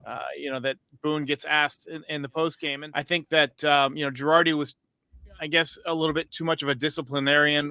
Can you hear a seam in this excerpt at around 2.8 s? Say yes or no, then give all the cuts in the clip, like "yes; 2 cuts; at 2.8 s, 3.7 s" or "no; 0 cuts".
yes; 1 cut; at 2.8 s